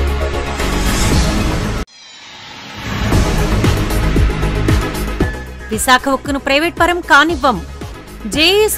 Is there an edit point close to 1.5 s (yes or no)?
yes